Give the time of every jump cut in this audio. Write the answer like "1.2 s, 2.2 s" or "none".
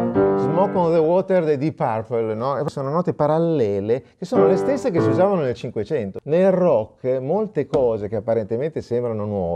2.7 s, 6.1 s